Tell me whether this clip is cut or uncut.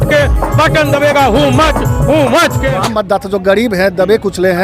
cut